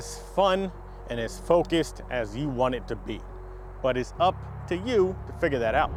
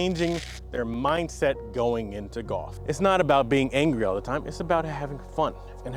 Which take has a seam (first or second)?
second